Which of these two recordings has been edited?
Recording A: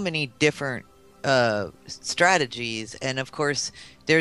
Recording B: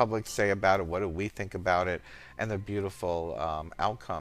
A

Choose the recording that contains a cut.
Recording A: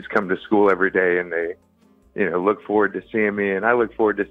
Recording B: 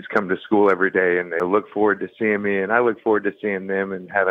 B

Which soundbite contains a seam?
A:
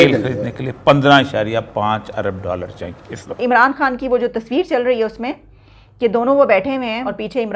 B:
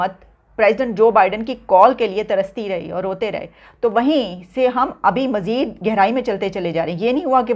A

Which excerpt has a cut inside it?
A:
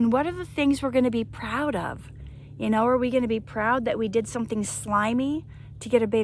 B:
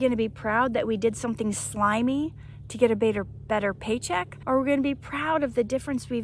B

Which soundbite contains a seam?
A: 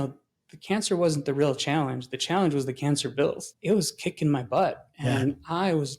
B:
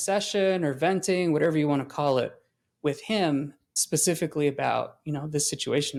A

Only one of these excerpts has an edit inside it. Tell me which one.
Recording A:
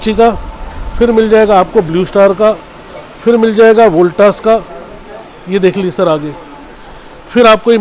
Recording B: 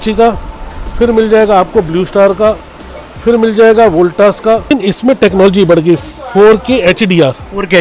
B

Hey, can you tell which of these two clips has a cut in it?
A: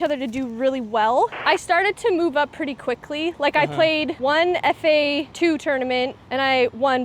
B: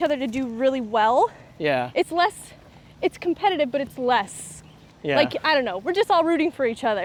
A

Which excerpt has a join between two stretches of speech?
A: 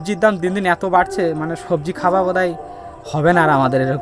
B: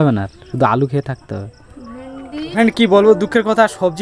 B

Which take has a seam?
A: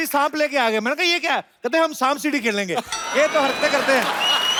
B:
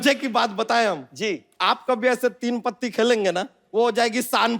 B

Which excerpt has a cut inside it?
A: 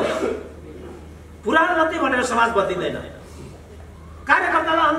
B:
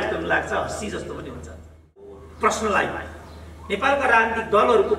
B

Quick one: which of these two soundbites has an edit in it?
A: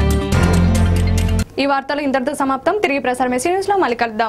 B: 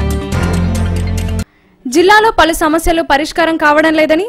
B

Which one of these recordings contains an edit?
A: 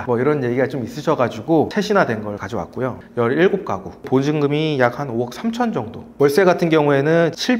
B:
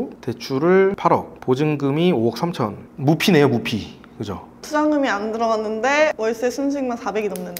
A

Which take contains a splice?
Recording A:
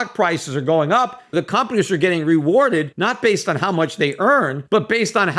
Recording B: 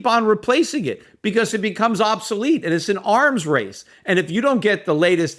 A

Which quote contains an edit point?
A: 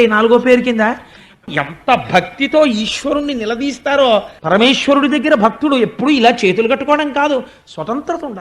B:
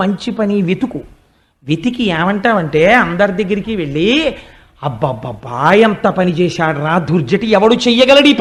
A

